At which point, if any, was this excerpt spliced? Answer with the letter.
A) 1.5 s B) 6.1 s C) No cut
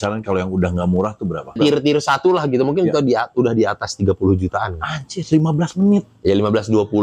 A